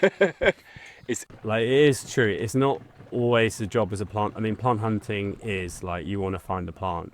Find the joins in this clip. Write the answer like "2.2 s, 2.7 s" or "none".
1.2 s

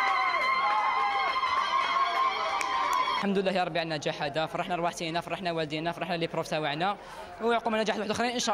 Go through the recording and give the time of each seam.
3.2 s

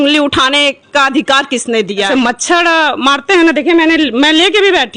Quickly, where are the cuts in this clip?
2.1 s

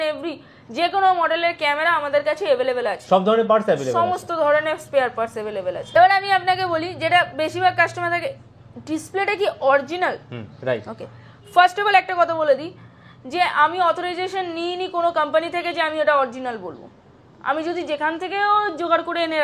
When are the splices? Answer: none

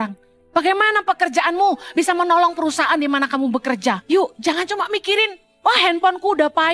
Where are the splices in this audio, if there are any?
4.0 s, 5.4 s

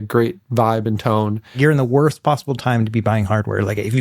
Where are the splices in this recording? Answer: 1.6 s

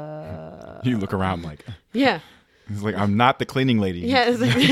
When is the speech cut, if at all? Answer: 2.4 s

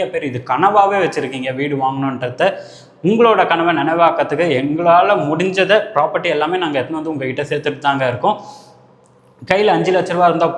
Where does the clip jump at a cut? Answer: none

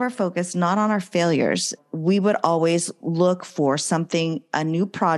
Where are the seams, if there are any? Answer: 1.8 s

